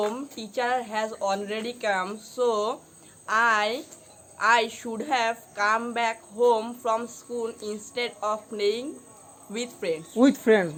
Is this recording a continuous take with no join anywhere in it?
yes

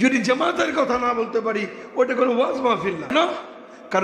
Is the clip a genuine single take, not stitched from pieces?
no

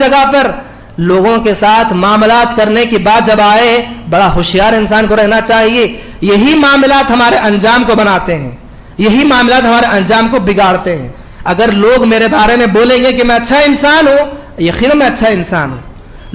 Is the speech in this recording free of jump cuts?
yes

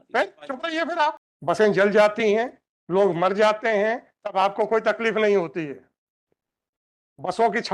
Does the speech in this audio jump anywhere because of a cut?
yes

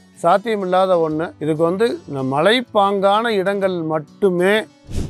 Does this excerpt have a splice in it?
yes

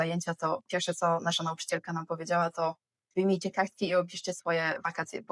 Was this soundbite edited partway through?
no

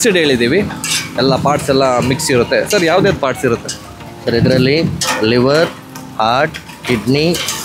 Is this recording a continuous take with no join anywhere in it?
yes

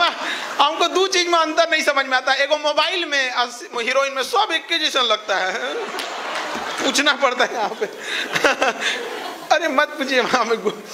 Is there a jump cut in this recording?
no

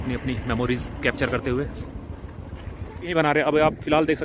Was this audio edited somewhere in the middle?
yes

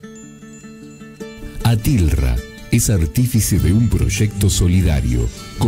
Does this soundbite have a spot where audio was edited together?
no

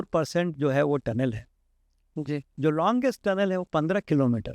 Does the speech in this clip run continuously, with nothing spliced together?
yes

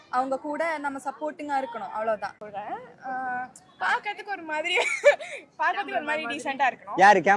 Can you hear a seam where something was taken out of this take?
yes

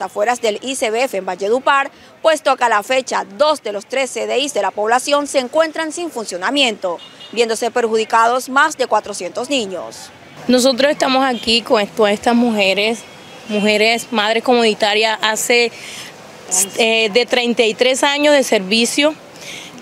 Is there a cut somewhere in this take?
no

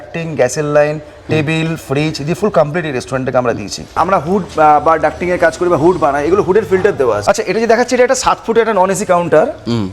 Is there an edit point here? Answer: yes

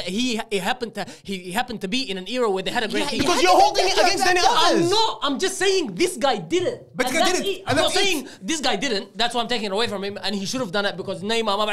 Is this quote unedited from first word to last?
yes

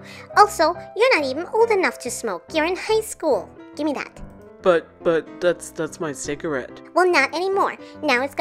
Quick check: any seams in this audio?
yes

